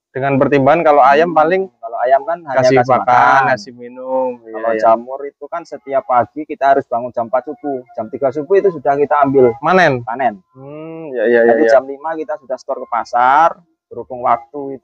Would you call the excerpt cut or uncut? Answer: uncut